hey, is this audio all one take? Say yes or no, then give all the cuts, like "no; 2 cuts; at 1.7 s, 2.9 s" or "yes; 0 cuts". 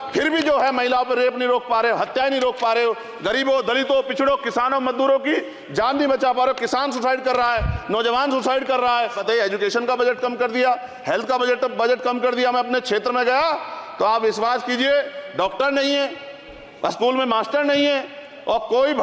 no; 1 cut; at 9.2 s